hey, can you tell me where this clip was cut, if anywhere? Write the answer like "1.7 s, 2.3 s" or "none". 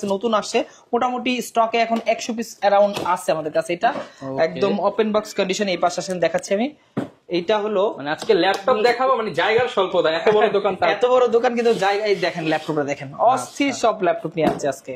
none